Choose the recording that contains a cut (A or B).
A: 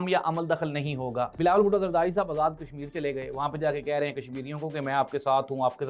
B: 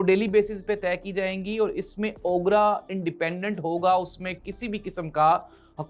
A